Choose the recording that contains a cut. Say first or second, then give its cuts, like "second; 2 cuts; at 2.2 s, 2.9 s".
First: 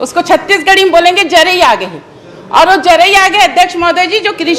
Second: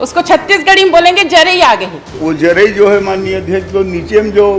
second; 1 cut; at 2.2 s